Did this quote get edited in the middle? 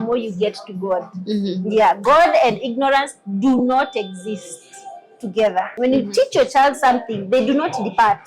yes; 1 cut; at 5.7 s

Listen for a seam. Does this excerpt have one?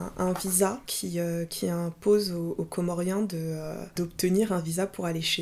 yes; 2 cuts; at 0.9 s, 3.9 s

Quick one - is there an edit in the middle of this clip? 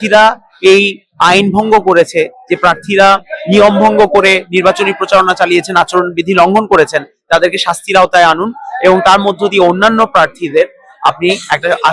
no; 0 cuts

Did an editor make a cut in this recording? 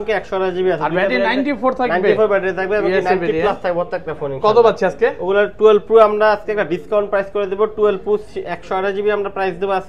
no; 0 cuts

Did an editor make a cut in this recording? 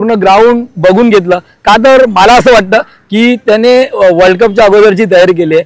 no; 0 cuts

